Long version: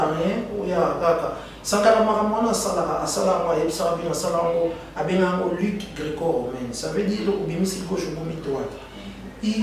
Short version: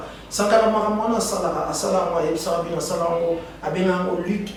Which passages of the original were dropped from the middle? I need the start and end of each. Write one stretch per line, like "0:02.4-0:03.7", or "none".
none